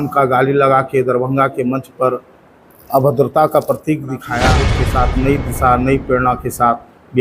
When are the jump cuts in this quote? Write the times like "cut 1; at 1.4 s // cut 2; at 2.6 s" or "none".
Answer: cut 1; at 4.8 s